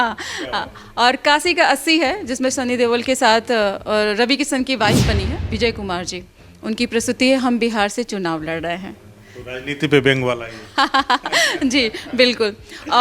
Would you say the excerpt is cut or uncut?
cut